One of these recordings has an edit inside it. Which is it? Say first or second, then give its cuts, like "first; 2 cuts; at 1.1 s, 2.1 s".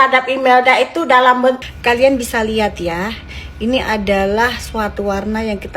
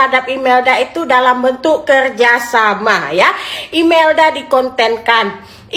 first; 1 cut; at 1.6 s